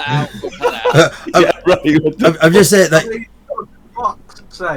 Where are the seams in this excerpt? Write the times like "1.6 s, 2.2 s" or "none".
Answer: none